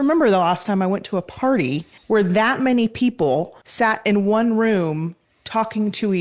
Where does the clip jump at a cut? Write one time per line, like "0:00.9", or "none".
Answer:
0:01.9
0:03.6